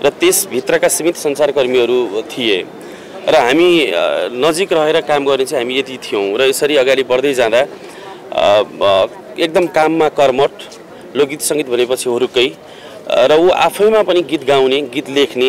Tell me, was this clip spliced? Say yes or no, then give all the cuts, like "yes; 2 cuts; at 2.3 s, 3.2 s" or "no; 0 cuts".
no; 0 cuts